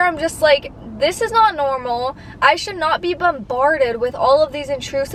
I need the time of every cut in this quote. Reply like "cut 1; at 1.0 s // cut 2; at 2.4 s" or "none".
none